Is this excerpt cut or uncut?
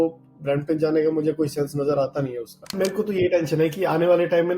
cut